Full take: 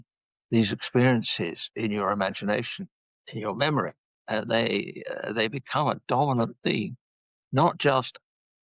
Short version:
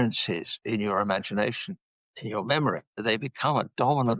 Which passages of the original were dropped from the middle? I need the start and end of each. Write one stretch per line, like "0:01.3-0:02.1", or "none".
0:04.0-0:05.2